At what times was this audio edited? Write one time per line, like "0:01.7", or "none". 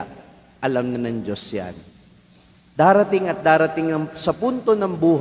0:02.7